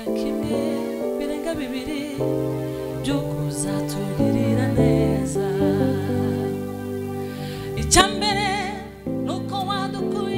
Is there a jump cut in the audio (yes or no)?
no